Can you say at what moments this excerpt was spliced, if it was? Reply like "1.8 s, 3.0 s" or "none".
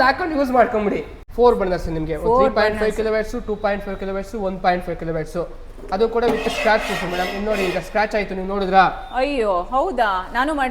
1.2 s